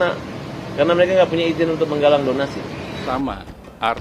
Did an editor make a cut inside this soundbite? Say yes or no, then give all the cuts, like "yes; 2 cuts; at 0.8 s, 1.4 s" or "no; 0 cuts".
yes; 1 cut; at 3.0 s